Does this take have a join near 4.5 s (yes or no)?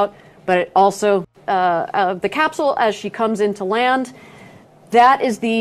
no